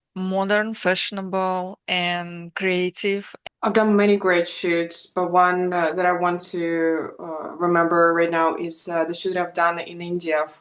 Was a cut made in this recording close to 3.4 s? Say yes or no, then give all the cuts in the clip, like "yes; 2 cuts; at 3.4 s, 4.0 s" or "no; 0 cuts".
yes; 1 cut; at 3.4 s